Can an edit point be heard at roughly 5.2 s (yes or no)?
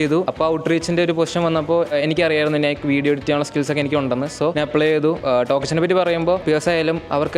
yes